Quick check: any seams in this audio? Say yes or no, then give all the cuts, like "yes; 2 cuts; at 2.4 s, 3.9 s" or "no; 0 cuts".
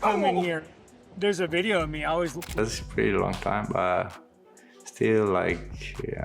yes; 1 cut; at 2.6 s